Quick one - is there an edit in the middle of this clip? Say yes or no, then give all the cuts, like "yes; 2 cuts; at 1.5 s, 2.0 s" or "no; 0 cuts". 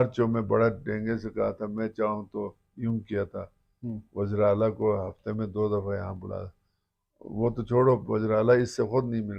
no; 0 cuts